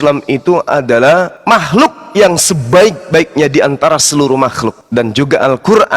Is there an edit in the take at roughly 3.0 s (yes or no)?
no